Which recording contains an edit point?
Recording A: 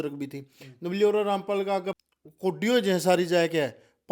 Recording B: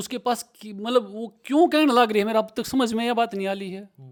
A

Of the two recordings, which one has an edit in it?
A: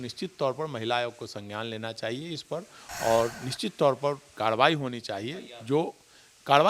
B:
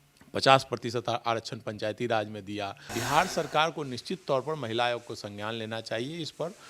B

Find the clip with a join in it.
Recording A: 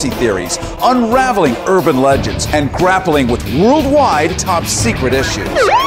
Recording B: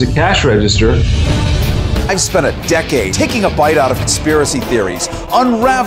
A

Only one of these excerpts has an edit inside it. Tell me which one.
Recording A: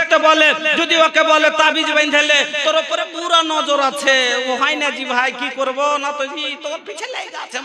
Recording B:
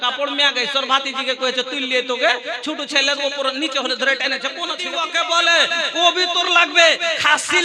B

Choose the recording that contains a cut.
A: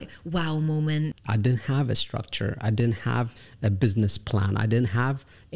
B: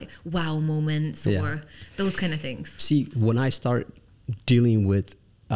A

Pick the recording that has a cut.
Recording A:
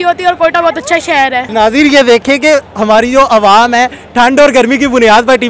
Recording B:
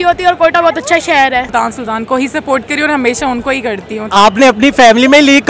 B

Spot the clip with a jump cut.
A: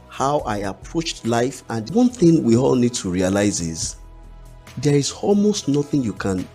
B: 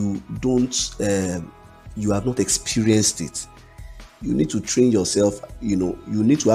A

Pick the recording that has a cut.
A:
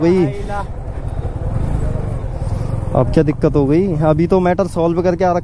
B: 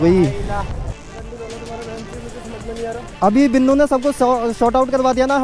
B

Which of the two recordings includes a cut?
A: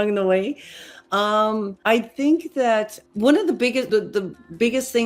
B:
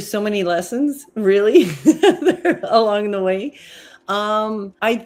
A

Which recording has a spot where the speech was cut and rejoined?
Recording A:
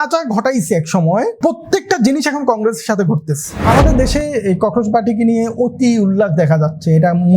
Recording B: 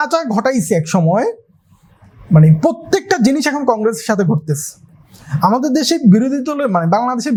A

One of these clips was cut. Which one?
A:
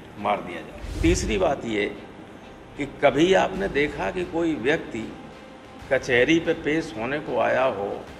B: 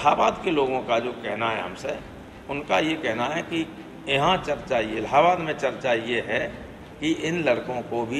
A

